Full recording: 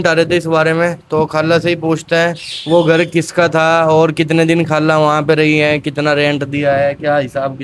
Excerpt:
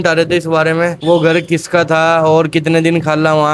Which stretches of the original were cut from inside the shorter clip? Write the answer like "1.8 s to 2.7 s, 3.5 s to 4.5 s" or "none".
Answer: 1.0 s to 2.6 s